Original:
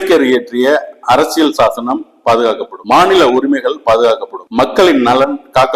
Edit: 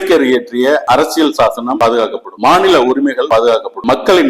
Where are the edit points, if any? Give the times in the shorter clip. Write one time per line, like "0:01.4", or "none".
0:00.8
0:01.7
0:03.4

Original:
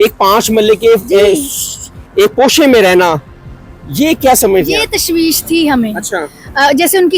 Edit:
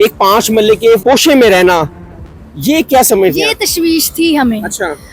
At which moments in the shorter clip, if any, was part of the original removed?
0:01.0

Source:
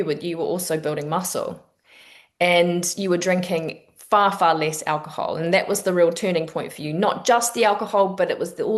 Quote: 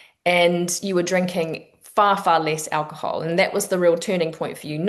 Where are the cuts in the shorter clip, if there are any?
none

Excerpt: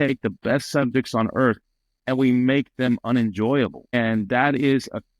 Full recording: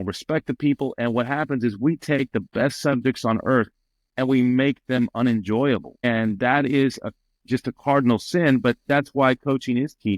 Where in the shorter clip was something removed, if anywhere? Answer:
none

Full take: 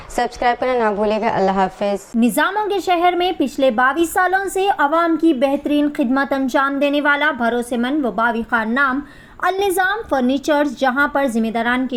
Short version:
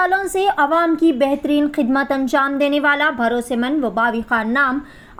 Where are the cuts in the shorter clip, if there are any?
none

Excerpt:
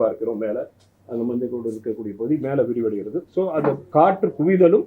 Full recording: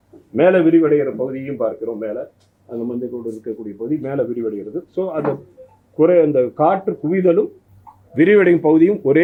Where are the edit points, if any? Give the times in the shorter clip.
0:03.9

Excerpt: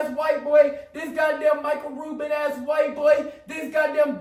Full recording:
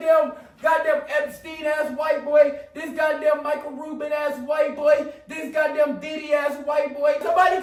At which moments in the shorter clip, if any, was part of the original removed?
none

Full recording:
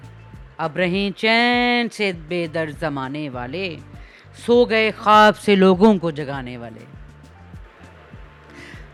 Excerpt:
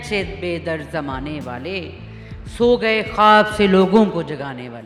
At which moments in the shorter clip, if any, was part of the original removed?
none

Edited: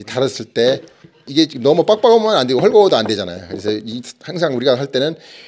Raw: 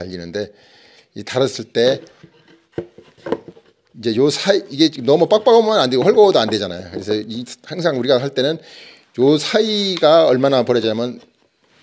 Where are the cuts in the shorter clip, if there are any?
0:01.3

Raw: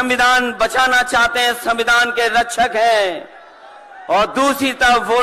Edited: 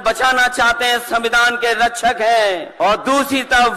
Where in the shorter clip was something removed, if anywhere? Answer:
0:02.7

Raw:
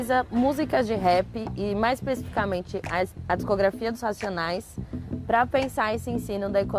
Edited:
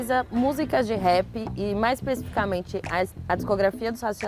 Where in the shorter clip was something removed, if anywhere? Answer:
none

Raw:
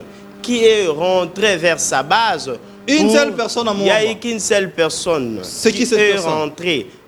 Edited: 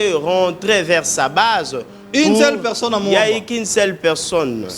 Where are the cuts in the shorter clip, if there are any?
none

